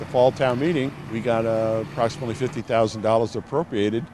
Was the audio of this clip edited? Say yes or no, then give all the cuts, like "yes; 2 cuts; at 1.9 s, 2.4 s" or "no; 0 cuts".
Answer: yes; 1 cut; at 1.0 s